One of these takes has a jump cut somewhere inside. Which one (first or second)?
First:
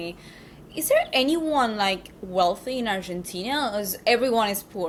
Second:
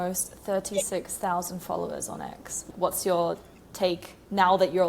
second